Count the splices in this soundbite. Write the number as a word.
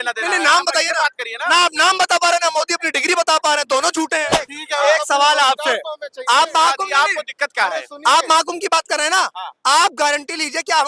one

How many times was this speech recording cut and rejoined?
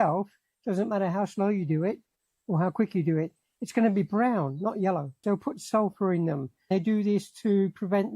two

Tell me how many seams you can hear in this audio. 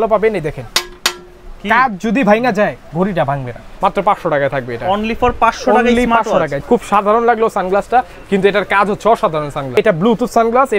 three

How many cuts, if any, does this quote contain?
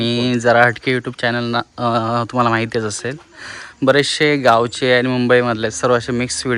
zero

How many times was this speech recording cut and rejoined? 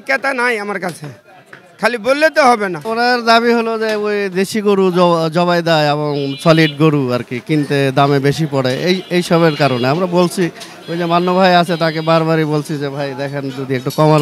one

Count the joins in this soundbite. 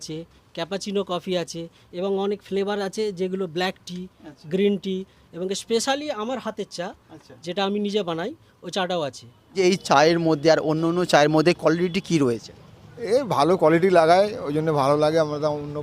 one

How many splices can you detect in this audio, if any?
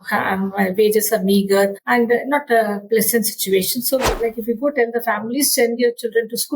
two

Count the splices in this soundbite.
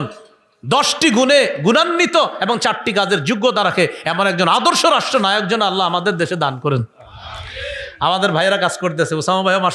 zero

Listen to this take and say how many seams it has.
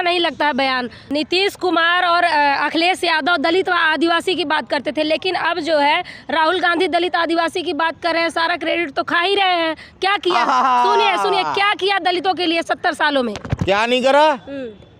one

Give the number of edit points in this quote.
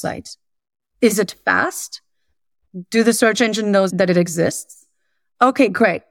one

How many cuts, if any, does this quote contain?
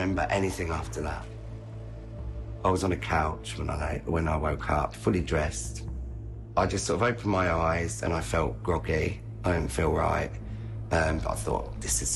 zero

